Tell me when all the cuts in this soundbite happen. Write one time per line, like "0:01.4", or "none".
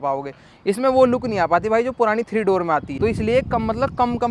0:02.9